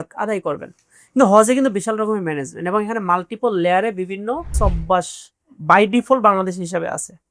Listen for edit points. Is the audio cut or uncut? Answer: cut